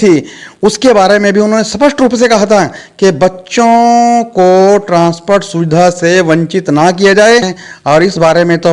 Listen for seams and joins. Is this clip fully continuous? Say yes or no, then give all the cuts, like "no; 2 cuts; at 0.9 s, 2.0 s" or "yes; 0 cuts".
no; 1 cut; at 7.6 s